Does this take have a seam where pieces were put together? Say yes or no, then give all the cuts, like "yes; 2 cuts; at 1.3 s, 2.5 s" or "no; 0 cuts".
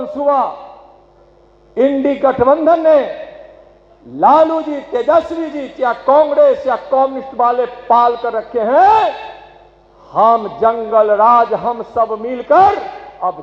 no; 0 cuts